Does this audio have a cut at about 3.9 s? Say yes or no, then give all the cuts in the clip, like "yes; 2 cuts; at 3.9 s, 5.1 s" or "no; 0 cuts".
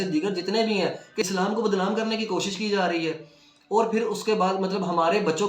no; 1 cut; at 1.2 s